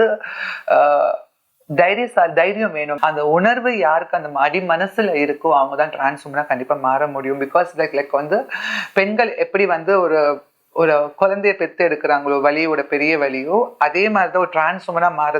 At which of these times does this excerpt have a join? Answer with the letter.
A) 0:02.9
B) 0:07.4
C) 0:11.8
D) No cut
A